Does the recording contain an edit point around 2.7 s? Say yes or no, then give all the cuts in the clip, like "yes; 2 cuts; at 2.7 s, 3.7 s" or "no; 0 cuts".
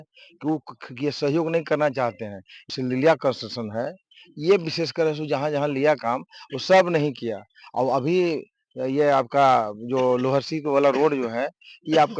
yes; 1 cut; at 2.7 s